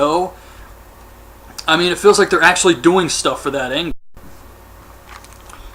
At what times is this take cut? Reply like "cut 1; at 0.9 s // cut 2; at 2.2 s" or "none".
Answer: none